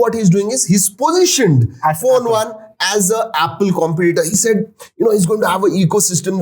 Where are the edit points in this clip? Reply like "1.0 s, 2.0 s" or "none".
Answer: none